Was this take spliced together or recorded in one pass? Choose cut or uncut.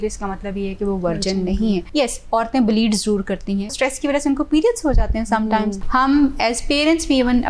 cut